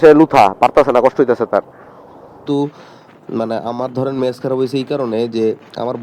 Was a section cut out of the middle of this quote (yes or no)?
yes